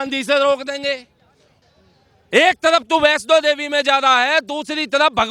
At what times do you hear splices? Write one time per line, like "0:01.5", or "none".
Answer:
0:01.4

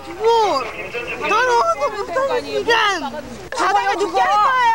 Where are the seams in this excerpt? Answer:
0:03.4

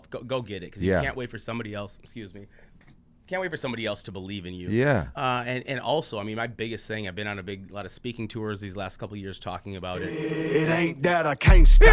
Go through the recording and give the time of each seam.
0:10.5

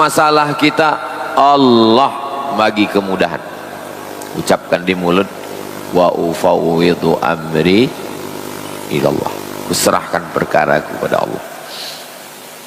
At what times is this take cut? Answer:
none

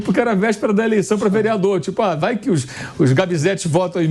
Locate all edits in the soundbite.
none

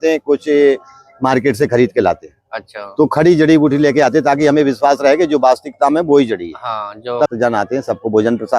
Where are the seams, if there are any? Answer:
0:07.3

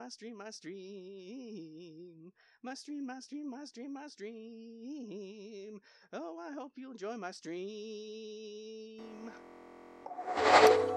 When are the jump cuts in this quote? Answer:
0:10.0

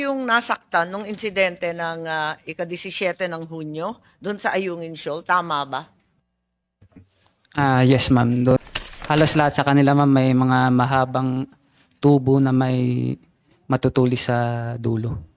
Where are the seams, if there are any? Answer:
0:08.5

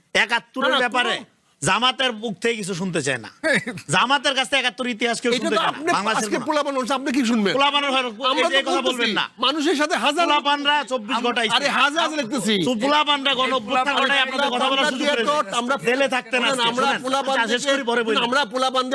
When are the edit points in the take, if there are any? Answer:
none

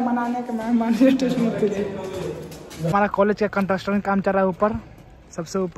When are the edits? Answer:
0:02.9

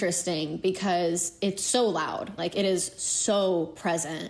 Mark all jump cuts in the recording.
0:02.3

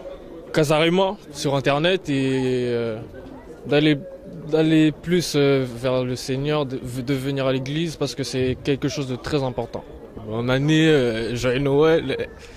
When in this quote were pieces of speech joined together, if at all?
none

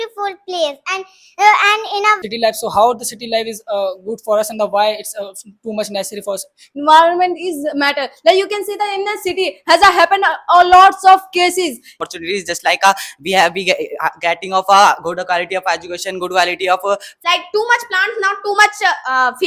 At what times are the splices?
0:02.2
0:06.7
0:12.0
0:17.1

